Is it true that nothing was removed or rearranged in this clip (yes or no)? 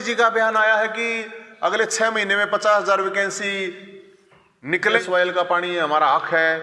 no